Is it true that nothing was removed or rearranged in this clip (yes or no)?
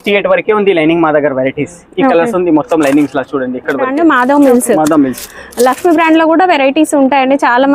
no